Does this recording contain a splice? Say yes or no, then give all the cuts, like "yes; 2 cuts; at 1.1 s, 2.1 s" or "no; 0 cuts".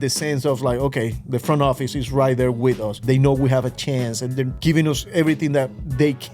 yes; 2 cuts; at 3.0 s, 4.5 s